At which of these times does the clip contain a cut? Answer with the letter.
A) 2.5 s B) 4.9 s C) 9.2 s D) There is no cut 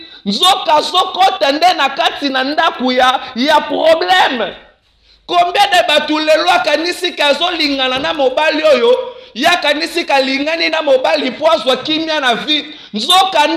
D